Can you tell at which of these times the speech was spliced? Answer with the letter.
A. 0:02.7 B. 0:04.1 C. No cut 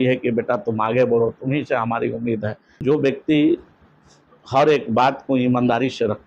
A